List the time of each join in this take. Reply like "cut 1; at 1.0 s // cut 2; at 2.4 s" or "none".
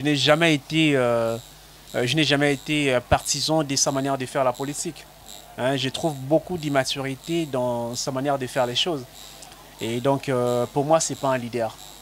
none